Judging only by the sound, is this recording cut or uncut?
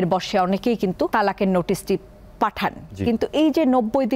cut